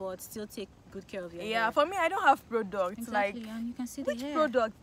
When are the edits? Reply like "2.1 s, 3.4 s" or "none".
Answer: none

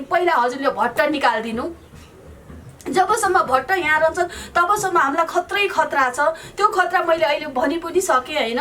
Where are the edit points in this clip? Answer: none

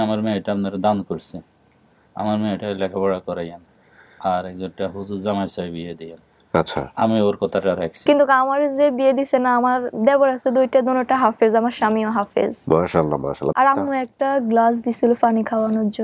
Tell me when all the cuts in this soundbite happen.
13.5 s

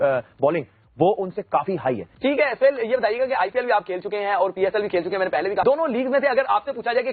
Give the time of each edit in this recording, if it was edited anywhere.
none

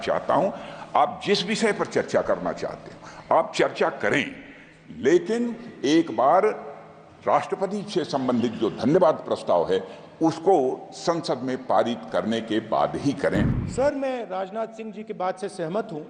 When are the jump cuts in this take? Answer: 13.6 s

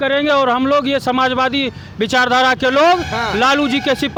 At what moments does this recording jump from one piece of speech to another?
none

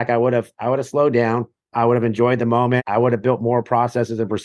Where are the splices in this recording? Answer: 1.6 s, 2.8 s

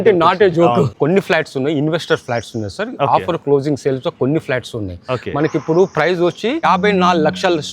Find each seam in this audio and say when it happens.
1.0 s, 6.6 s

